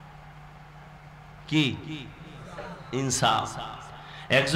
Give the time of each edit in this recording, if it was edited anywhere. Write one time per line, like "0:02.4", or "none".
none